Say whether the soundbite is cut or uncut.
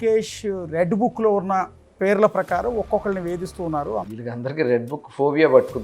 cut